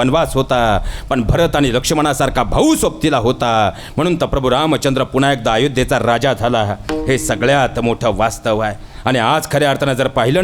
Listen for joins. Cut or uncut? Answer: uncut